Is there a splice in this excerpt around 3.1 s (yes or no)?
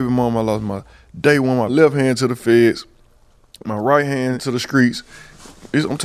no